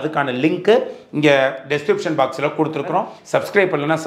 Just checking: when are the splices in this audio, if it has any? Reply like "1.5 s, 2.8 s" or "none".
3.2 s